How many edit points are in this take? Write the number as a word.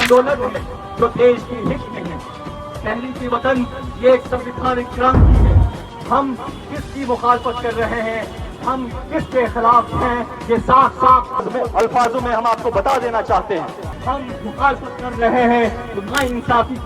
two